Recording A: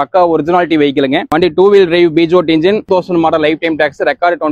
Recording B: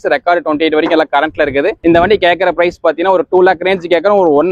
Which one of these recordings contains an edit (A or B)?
A